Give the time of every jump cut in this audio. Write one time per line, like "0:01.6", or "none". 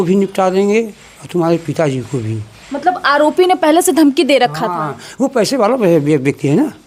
none